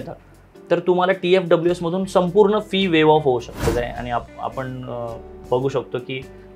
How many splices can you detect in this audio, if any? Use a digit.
1